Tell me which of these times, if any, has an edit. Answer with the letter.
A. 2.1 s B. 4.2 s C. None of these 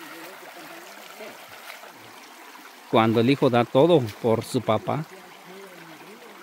A